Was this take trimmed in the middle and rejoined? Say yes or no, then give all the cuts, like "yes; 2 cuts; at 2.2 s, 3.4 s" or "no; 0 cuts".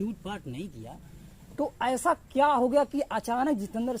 yes; 1 cut; at 1.4 s